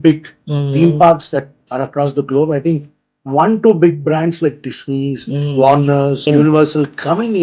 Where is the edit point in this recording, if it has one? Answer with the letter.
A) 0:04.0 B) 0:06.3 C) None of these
B